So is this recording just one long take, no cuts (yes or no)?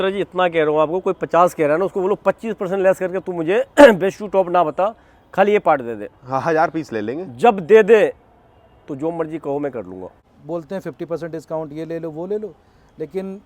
no